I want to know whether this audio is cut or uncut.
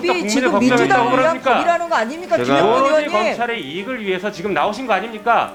uncut